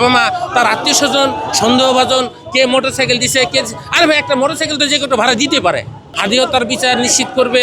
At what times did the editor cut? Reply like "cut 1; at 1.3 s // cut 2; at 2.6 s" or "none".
cut 1; at 6.0 s